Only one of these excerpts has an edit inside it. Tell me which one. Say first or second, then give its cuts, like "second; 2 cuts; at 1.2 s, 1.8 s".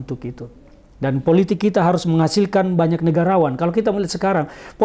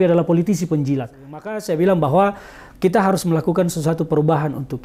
second; 1 cut; at 1.6 s